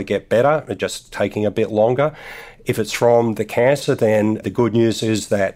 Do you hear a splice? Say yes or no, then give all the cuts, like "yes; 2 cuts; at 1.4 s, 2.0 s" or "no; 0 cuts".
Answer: yes; 1 cut; at 4.4 s